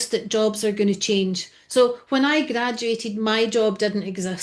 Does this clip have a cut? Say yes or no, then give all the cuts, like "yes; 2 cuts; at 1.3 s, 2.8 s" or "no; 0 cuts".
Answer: no; 0 cuts